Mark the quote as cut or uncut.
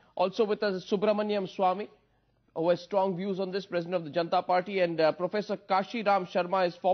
uncut